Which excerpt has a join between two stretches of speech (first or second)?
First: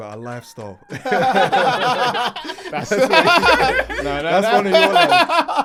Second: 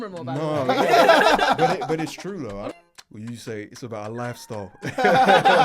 second